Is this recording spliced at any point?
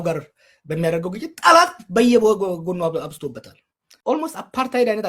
yes; 1 cut; at 4.1 s

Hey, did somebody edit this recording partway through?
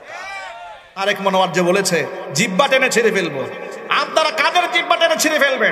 yes; 1 cut; at 1.0 s

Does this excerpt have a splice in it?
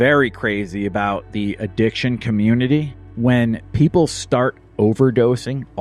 no; 0 cuts

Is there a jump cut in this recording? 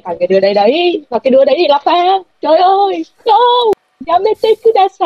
yes; 1 cut; at 3.9 s

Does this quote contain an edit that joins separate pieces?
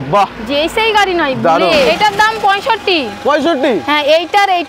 yes; 1 cut; at 1.9 s

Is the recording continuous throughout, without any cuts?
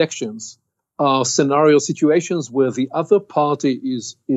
yes; 0 cuts

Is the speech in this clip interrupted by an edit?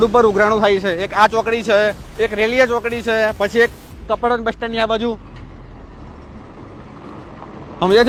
no; 0 cuts

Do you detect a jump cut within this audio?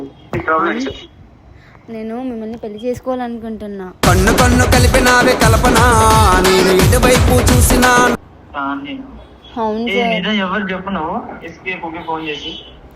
yes; 1 cut; at 8.2 s

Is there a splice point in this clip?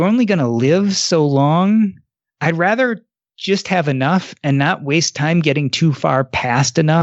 no; 0 cuts

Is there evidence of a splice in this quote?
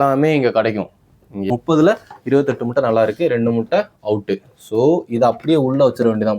yes; 1 cut; at 1.4 s

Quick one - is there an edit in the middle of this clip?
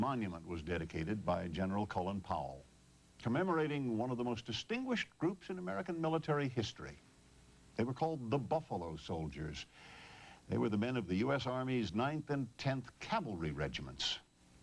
no; 0 cuts

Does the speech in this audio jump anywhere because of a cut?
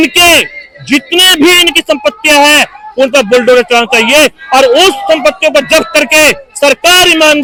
no; 0 cuts

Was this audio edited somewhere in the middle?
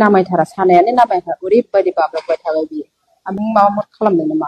yes; 1 cut; at 3.3 s

